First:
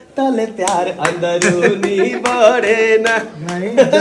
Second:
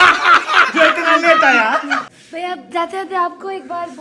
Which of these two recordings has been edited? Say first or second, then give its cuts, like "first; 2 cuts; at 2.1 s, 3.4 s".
second; 1 cut; at 2.4 s